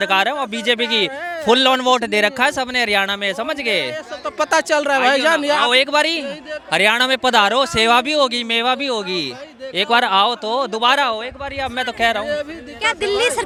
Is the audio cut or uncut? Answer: uncut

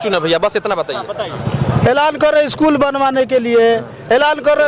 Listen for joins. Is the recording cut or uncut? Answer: cut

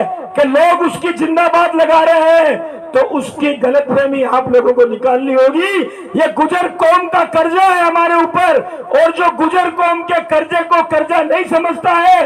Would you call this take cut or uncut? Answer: uncut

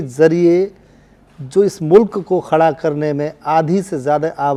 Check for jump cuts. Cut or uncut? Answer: uncut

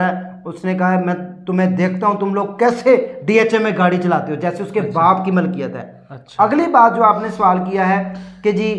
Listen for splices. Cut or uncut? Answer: uncut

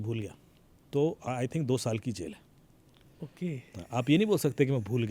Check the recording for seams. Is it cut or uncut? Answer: uncut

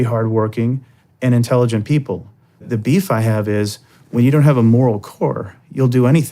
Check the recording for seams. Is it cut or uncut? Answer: cut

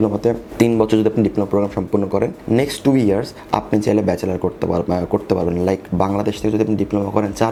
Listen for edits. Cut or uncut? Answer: uncut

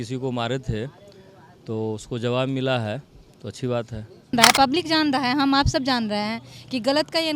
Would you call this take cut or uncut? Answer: cut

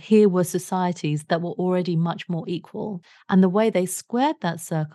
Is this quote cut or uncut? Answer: cut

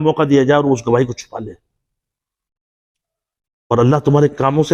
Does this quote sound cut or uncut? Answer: uncut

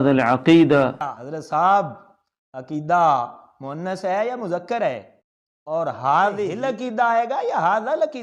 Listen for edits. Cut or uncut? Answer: cut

